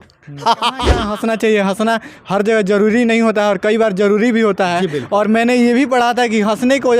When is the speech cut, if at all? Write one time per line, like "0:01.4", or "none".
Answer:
0:01.0